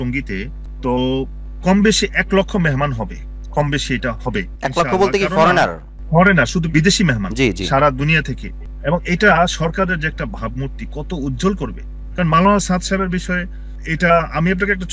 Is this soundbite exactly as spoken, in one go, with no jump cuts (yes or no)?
yes